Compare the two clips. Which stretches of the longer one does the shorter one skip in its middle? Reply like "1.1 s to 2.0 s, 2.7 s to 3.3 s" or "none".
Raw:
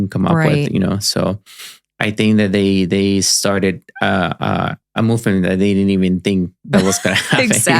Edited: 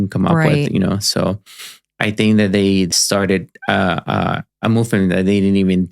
2.9 s to 3.2 s